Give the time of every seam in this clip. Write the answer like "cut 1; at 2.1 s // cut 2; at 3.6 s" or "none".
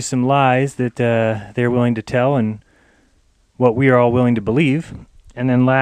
cut 1; at 1.8 s